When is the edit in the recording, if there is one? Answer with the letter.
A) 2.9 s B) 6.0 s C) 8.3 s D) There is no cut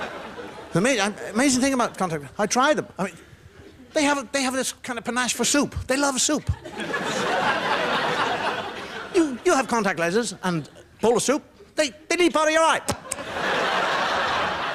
C